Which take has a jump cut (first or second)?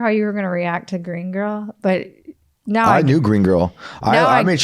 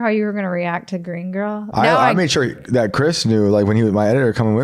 second